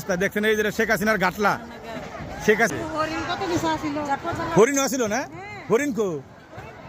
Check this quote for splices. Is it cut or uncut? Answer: cut